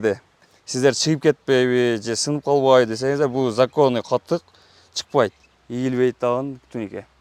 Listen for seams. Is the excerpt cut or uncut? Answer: uncut